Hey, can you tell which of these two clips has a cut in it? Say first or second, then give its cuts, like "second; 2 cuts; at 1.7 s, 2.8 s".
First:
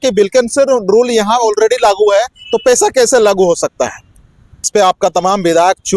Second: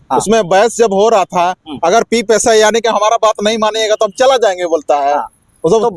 first; 1 cut; at 4.6 s